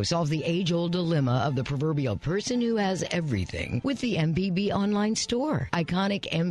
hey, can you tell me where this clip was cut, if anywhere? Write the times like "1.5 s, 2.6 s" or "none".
none